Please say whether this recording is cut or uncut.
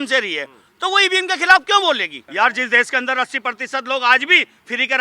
cut